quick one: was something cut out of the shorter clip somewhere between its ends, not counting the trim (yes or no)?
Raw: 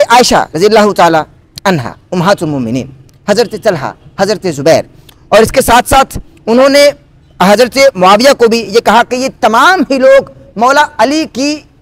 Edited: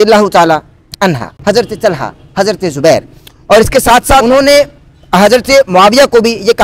yes